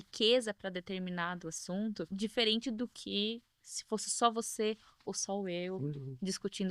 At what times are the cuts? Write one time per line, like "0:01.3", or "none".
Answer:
0:02.1

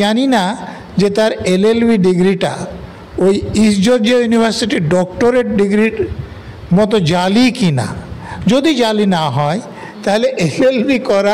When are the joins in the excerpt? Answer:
none

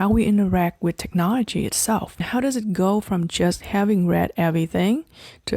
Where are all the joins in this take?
0:02.3

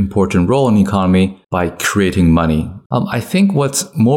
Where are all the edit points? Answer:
0:01.4
0:02.8

